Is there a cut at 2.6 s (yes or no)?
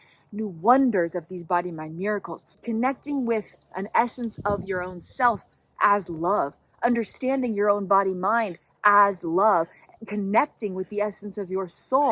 yes